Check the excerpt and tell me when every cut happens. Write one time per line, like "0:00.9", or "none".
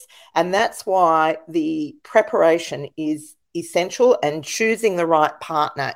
none